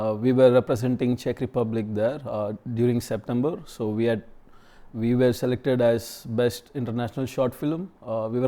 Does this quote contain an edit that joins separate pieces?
no; 0 cuts

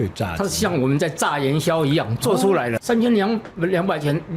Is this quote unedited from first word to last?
no; 1 cut; at 2.8 s

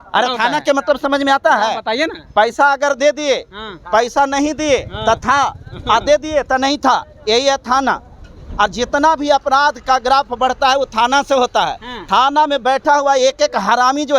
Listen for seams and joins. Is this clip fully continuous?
yes; 0 cuts

